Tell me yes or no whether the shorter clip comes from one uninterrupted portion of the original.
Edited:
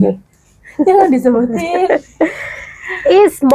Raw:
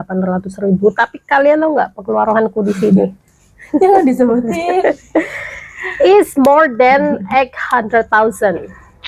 yes